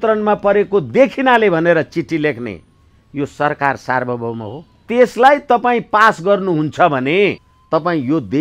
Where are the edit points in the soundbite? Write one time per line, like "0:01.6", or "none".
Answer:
0:04.8
0:07.5